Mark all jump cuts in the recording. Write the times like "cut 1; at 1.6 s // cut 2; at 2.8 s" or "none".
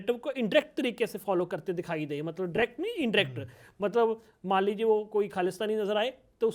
none